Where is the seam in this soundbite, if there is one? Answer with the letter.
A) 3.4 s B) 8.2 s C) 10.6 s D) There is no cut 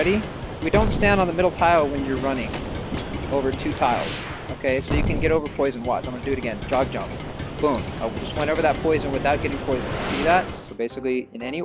C